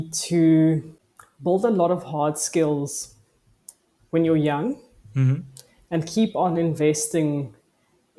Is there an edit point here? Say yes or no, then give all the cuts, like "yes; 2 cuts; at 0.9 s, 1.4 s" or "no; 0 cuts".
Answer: no; 0 cuts